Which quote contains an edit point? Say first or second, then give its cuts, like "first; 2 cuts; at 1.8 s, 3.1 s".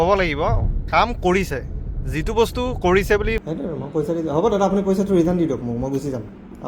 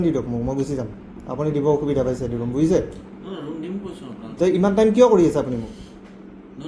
first; 1 cut; at 3.4 s